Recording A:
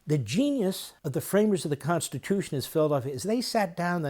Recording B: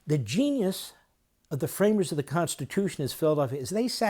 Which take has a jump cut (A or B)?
A